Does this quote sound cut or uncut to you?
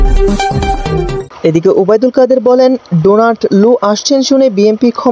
cut